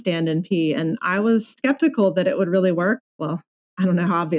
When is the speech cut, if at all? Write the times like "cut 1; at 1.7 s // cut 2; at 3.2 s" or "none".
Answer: cut 1; at 1.6 s // cut 2; at 3.0 s